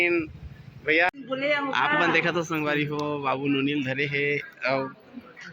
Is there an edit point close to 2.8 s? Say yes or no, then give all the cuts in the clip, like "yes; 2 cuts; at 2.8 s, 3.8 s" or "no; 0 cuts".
no; 1 cut; at 1.1 s